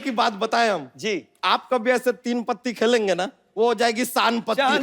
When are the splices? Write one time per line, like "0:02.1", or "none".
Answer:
0:00.9
0:03.4

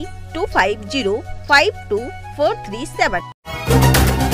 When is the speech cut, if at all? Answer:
0:03.4

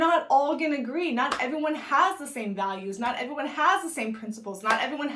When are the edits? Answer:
none

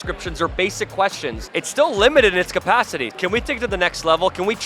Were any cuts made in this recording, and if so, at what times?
0:01.4
0:03.1

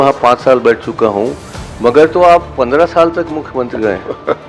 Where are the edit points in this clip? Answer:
none

